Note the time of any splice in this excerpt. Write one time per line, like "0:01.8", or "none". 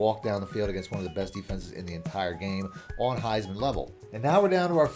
0:04.0